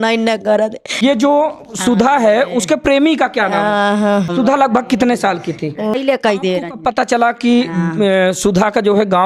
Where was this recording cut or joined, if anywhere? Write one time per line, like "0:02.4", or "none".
0:01.0
0:04.3
0:05.9